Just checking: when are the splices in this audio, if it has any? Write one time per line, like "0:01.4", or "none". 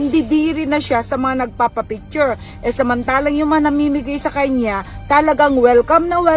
none